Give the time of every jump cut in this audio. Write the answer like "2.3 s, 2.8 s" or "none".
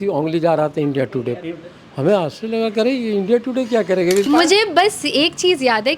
4.3 s